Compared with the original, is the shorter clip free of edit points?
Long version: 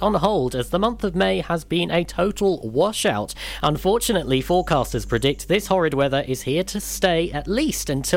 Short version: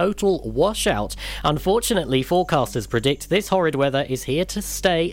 yes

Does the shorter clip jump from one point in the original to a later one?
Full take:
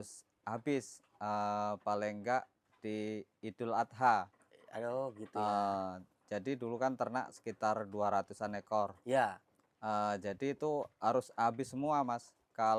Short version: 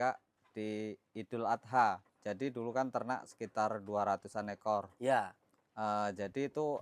yes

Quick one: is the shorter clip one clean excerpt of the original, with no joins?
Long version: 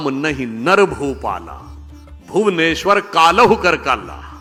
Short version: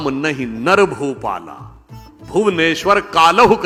yes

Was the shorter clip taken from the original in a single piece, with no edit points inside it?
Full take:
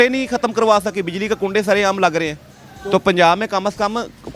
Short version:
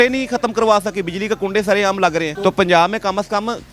no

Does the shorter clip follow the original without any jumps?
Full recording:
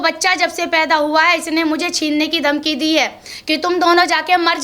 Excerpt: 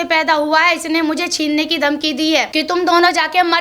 no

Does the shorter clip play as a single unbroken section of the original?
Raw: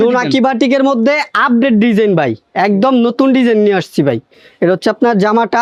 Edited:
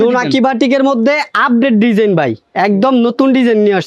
yes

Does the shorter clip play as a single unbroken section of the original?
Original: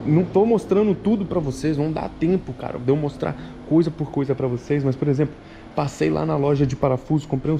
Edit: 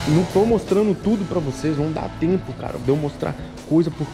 yes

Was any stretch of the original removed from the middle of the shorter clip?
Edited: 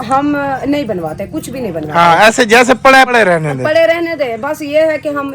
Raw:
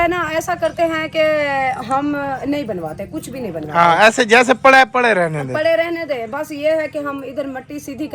yes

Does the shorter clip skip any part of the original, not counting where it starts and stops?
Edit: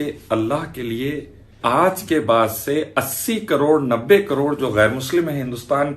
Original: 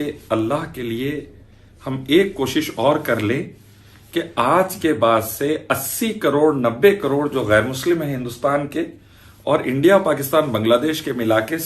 yes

